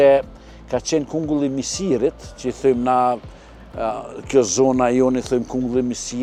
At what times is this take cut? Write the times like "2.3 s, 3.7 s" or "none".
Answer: none